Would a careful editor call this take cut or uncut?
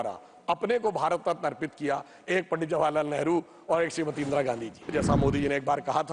cut